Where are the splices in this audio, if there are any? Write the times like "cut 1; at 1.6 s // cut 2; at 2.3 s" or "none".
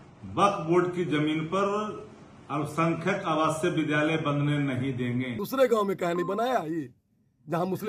cut 1; at 5.4 s